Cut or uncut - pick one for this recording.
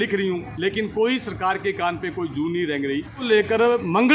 cut